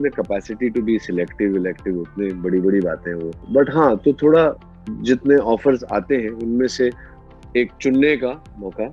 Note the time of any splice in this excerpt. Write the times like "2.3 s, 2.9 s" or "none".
none